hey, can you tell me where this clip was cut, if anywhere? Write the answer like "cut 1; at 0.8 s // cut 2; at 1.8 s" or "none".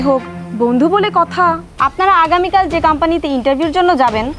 cut 1; at 1.7 s